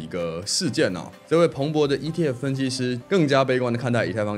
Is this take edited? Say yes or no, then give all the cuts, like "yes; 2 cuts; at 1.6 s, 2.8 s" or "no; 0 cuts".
yes; 2 cuts; at 1.1 s, 3.0 s